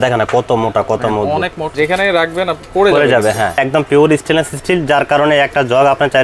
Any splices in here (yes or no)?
yes